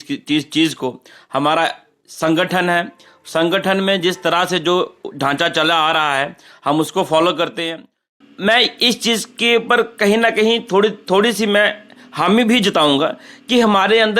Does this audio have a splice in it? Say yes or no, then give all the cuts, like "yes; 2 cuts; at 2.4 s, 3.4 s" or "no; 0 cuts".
yes; 1 cut; at 8.1 s